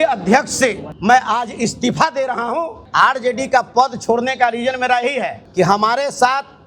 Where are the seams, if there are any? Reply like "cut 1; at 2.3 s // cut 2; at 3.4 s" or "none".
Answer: cut 1; at 0.9 s // cut 2; at 2.8 s // cut 3; at 5.4 s